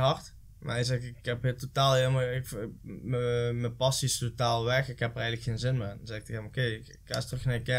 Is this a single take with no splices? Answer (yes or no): yes